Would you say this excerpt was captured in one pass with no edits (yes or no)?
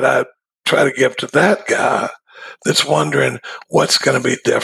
yes